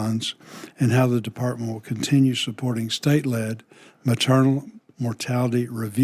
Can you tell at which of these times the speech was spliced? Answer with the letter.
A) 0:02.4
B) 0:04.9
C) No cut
C